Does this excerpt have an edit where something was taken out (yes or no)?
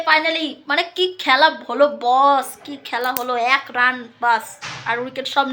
no